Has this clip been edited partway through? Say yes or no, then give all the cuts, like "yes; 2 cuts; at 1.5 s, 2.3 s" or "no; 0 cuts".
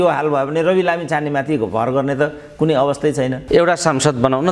yes; 1 cut; at 3.4 s